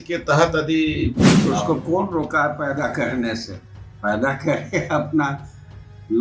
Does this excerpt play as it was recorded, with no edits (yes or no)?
no